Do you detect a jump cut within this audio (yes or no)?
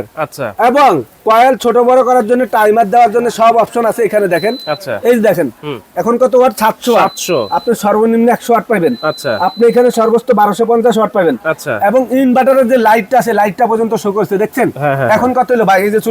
no